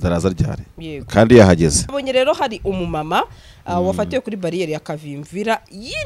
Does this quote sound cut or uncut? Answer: cut